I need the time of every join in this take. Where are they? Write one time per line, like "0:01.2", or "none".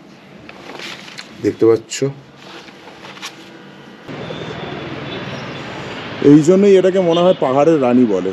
0:04.1